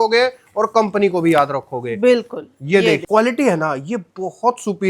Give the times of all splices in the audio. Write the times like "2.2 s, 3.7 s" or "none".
3.0 s